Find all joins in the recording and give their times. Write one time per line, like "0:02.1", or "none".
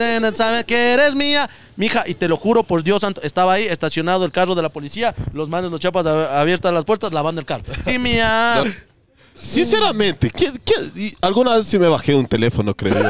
0:08.7